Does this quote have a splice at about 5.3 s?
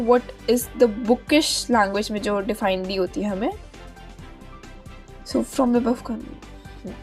yes; 2 cuts; at 3.6 s, 5.3 s

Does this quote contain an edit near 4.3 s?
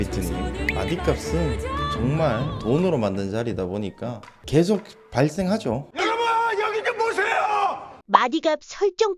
no; 1 cut; at 7.9 s

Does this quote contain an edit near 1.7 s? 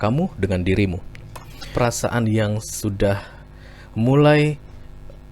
yes; 1 cut; at 1.7 s

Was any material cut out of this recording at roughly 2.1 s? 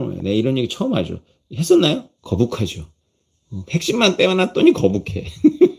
yes; 1 cut; at 2.1 s

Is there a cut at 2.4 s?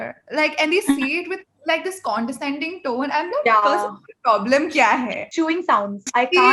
no; 1 cut; at 5.2 s

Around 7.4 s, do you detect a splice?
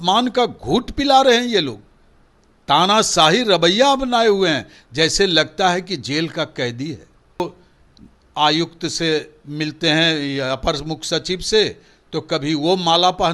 yes; 1 cut; at 7.4 s

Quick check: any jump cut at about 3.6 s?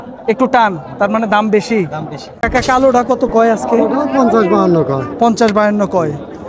no; 1 cut; at 2.3 s

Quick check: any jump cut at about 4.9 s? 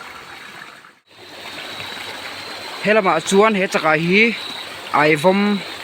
no; 1 cut; at 1.2 s

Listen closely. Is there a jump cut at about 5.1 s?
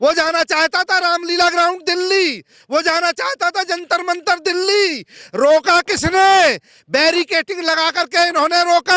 no; 0 cuts

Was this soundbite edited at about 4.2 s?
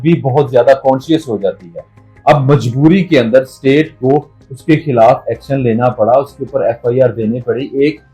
no; 0 cuts

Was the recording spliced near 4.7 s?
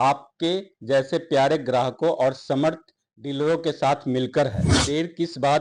yes; 1 cut; at 4.7 s

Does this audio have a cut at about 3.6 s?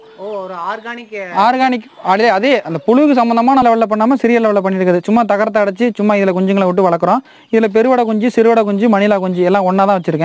yes; 1 cut; at 3.6 s

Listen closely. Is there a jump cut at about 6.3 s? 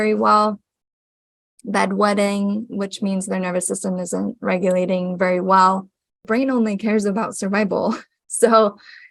yes; 1 cut; at 6.3 s

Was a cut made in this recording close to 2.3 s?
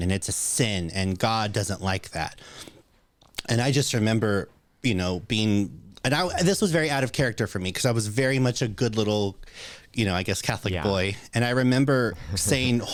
no; 0 cuts

